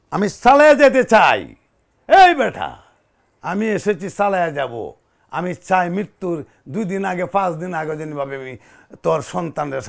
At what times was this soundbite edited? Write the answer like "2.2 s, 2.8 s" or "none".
none